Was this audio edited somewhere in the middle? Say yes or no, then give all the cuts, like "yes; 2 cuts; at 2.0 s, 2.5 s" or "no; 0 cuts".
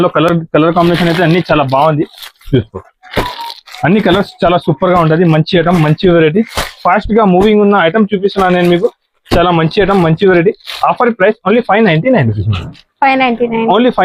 no; 0 cuts